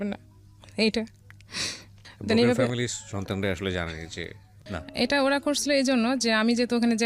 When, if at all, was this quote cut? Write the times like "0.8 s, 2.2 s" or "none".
4.8 s